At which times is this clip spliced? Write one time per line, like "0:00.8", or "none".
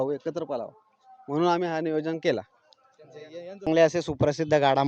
0:03.7